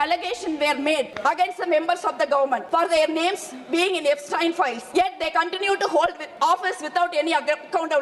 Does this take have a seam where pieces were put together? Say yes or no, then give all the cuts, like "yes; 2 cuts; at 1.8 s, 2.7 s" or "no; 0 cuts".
yes; 4 cuts; at 1.1 s, 2.6 s, 4.8 s, 6.2 s